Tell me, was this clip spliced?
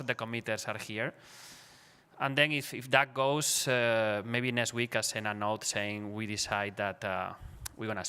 yes; 1 cut; at 4.9 s

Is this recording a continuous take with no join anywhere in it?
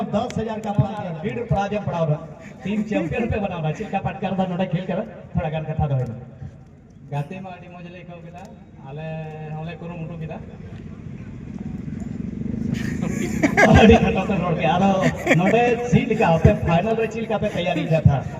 no; 1 cut; at 1.1 s

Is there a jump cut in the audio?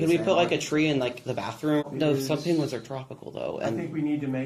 yes; 1 cut; at 1.8 s

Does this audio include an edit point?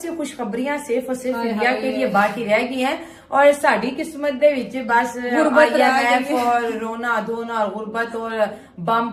no; 0 cuts

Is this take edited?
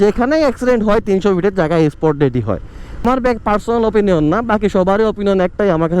yes; 1 cut; at 3.0 s

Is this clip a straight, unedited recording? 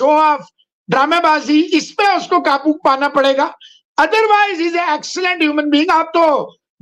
yes; 0 cuts

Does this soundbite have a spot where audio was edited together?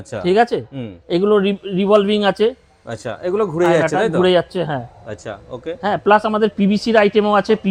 no; 0 cuts

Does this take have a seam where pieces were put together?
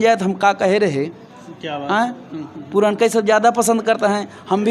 no; 0 cuts

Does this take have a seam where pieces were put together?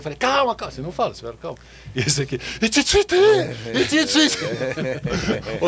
no; 0 cuts

